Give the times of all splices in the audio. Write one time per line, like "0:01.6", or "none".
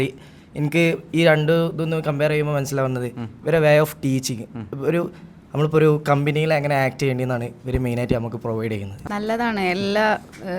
0:08.9